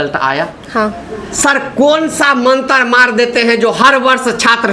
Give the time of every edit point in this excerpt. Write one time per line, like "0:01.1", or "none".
0:01.2

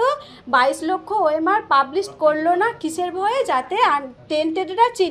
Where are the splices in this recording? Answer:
none

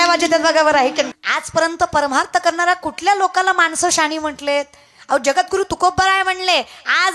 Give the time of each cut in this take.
0:01.1

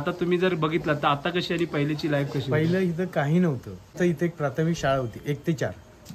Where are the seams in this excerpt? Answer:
0:03.9

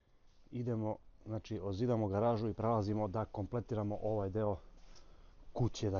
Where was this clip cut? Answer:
none

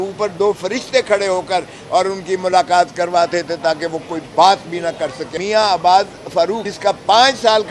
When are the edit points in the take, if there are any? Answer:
0:05.2
0:06.7

